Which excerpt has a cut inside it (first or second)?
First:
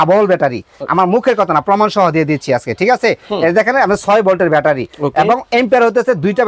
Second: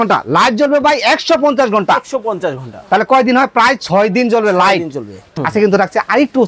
second